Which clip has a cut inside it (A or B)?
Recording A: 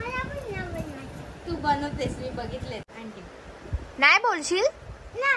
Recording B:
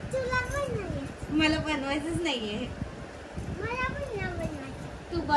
A